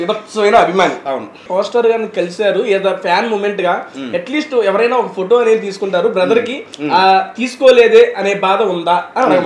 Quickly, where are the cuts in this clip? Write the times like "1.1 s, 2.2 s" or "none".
1.4 s